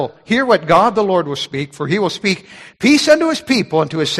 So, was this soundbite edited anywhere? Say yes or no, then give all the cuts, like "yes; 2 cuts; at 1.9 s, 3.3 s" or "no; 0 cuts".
no; 0 cuts